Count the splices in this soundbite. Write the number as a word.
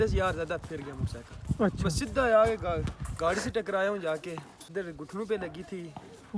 one